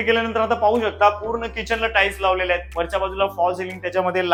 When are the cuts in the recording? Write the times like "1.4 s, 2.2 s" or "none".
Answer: none